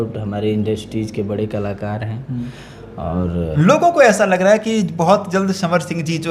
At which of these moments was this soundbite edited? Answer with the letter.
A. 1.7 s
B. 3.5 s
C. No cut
B